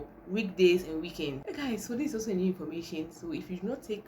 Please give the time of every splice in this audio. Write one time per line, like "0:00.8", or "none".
0:01.4